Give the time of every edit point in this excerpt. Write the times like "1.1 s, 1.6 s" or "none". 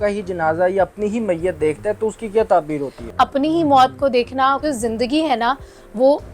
3.0 s, 4.6 s

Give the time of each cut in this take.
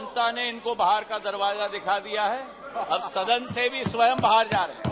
none

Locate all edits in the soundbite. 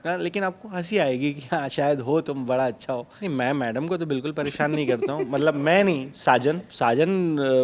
3.1 s, 6.7 s

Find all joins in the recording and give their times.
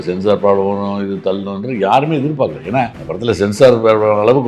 3.0 s

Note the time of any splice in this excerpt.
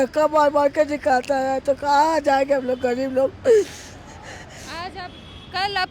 none

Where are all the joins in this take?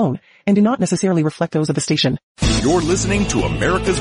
2.3 s

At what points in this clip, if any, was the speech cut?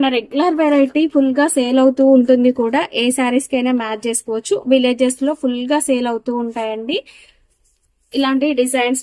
none

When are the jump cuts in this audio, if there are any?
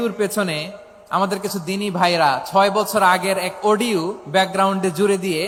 none

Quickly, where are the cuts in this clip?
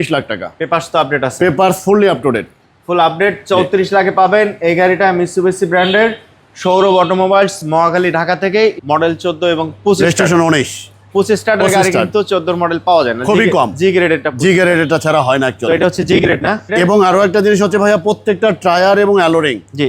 8.8 s

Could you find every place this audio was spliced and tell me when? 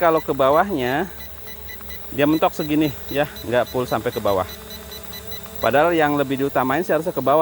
none

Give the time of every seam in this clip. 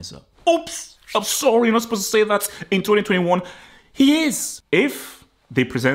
4.5 s

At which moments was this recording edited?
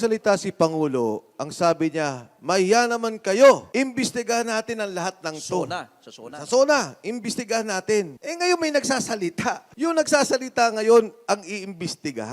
3.6 s, 8.2 s, 9.7 s

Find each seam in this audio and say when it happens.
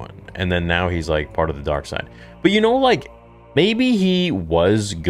none

